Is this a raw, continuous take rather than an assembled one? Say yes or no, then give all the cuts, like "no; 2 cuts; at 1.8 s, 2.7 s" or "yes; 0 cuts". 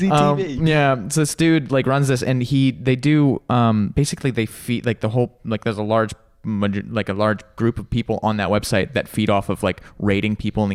yes; 0 cuts